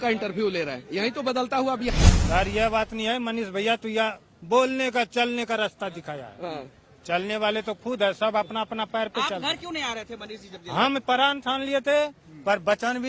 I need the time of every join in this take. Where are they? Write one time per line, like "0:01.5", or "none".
0:01.9

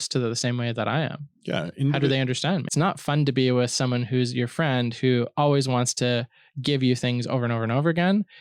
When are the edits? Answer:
0:02.7

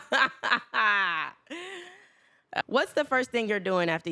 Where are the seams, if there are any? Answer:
0:02.6

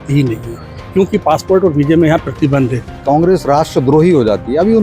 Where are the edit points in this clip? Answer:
0:03.0

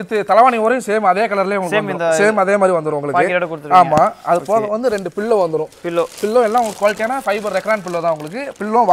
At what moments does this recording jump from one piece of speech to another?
none

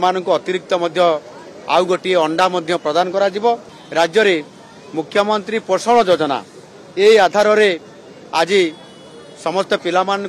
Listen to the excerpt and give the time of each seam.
0:03.8

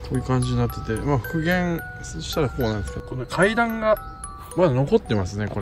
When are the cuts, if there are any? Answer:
0:03.0

